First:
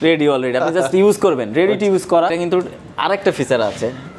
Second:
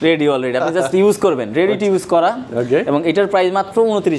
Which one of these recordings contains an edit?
first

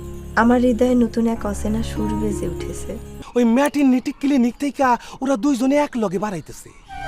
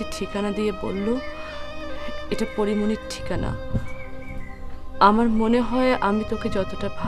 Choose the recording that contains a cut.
first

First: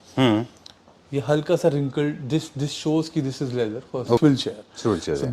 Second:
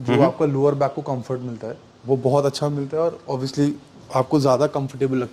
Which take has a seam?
first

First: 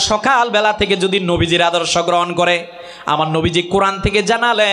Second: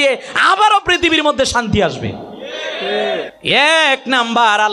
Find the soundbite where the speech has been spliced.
second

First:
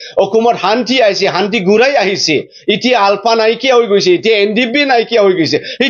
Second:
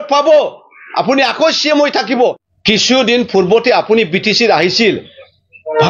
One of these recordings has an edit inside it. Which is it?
second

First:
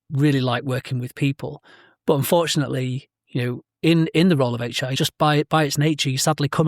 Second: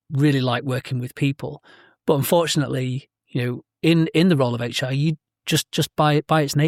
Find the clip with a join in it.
first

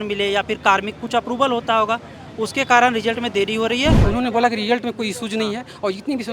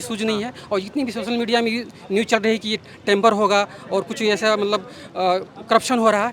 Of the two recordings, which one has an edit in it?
first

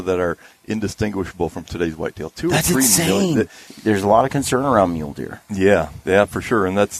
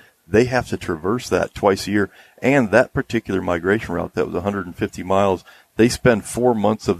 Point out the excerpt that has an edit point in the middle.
first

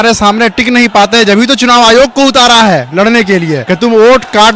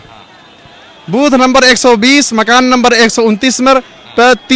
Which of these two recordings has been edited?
first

